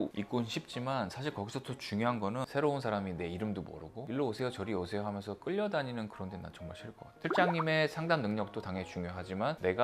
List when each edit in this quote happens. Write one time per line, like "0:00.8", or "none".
0:02.4
0:07.1

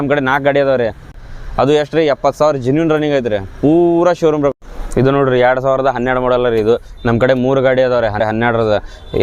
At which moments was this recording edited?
0:01.1
0:04.5
0:08.2

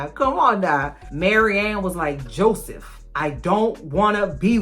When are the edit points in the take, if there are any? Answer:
0:00.9

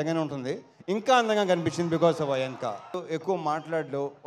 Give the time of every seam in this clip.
0:02.9

